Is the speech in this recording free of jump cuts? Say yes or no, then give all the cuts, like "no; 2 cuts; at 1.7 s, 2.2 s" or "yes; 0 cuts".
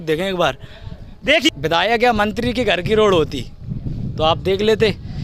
no; 1 cut; at 1.5 s